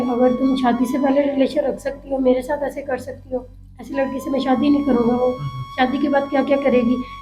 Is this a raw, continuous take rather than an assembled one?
yes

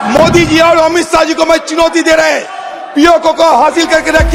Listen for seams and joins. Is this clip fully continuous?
yes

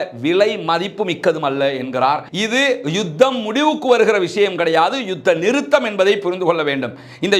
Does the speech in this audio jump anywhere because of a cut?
yes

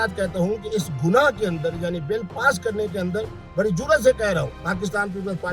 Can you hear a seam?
yes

